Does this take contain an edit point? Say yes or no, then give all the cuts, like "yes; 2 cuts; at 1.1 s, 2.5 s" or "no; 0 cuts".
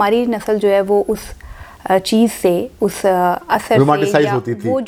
no; 0 cuts